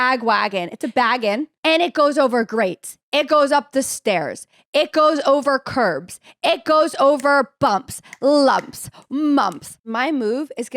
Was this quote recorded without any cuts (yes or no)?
no